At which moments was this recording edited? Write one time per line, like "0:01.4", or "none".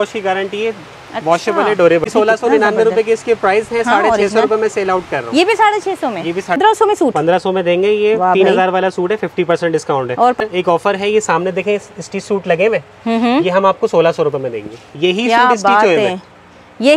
0:02.1
0:06.6
0:10.4